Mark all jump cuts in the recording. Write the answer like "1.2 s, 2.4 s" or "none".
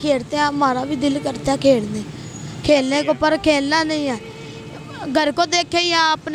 none